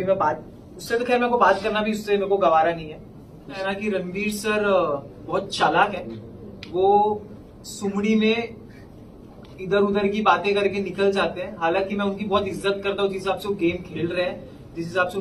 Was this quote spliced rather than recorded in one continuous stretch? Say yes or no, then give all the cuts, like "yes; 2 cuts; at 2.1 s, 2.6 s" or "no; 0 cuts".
yes; 1 cut; at 3.6 s